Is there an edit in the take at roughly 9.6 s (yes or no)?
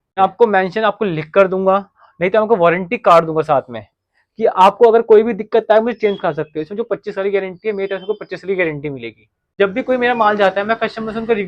yes